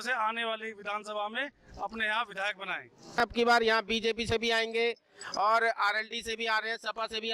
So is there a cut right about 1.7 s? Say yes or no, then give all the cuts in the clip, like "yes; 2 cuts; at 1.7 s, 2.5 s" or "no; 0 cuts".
no; 1 cut; at 3.1 s